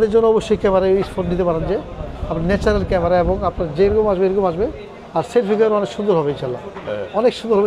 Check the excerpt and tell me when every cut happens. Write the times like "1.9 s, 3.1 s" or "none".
none